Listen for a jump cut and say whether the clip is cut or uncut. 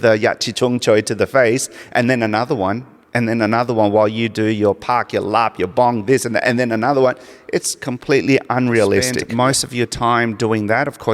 cut